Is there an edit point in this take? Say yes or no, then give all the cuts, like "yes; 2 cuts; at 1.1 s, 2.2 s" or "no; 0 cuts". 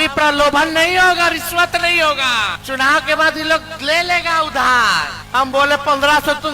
yes; 2 cuts; at 2.6 s, 5.2 s